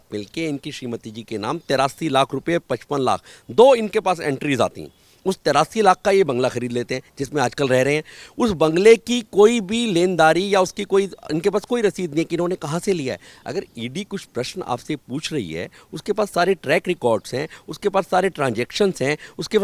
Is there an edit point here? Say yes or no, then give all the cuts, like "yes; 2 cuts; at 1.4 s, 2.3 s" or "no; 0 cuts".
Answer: no; 0 cuts